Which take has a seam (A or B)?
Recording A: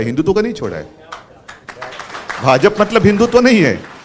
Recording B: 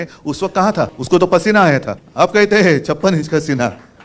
B